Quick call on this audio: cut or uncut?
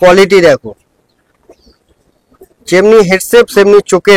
uncut